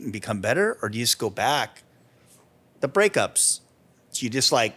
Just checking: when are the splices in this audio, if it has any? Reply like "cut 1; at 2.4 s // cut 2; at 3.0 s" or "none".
none